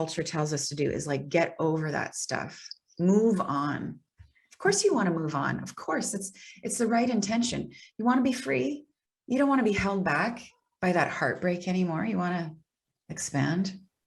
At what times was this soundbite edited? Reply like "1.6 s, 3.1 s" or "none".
none